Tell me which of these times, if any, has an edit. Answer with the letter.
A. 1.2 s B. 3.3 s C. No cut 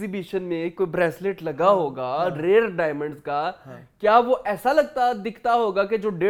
C